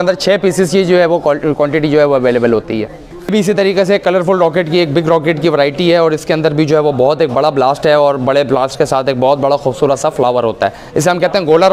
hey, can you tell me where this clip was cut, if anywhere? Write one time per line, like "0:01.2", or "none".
0:03.3